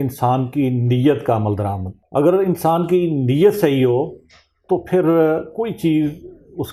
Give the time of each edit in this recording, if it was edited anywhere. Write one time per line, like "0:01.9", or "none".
none